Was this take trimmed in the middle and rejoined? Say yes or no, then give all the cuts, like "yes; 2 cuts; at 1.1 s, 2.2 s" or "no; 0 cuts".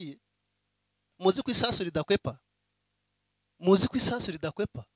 yes; 1 cut; at 1.1 s